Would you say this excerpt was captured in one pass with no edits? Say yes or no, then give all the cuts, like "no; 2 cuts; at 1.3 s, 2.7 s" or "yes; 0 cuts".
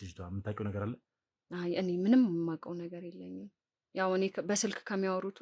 yes; 0 cuts